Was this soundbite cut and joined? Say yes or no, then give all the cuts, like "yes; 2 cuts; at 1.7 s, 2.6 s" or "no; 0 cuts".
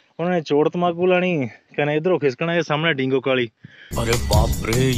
yes; 1 cut; at 4.0 s